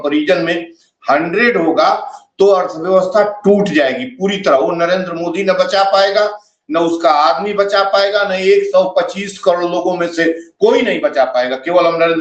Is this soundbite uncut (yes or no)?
yes